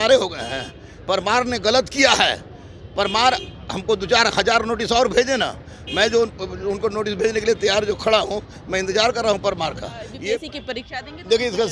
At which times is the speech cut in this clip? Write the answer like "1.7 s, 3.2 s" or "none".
10.4 s